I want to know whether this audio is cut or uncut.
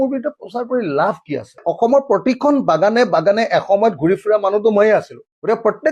cut